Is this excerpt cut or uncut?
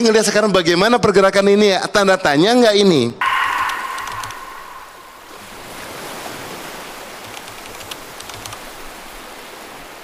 cut